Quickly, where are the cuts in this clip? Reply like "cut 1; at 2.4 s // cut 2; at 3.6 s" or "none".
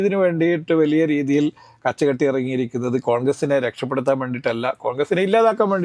none